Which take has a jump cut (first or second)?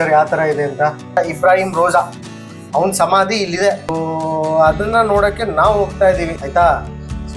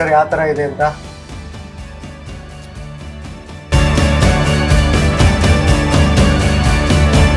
first